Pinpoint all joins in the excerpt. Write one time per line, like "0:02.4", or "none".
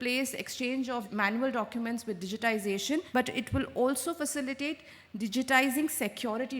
0:01.1
0:03.1